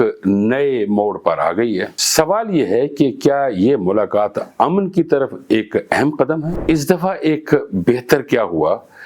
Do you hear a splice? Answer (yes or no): yes